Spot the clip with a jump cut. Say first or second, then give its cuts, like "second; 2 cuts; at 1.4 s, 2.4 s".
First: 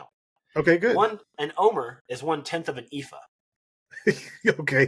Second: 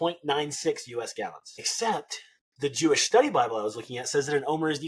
second; 1 cut; at 1.7 s